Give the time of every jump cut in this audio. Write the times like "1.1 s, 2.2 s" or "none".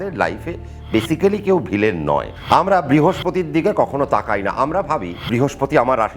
2.3 s, 5.1 s